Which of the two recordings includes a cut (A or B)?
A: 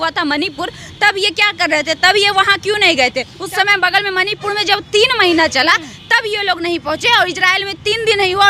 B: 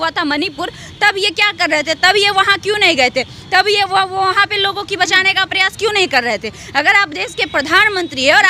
A